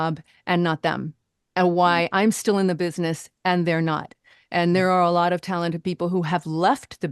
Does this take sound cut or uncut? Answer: uncut